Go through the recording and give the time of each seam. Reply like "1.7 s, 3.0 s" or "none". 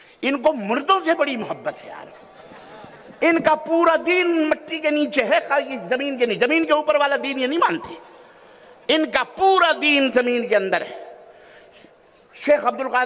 none